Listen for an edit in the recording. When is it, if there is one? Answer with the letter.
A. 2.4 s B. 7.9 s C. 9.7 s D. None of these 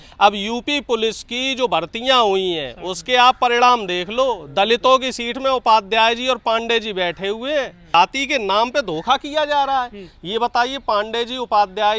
B